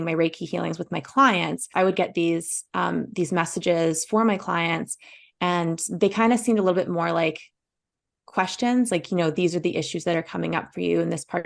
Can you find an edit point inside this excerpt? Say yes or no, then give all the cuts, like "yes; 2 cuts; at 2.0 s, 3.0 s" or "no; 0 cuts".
yes; 1 cut; at 1.7 s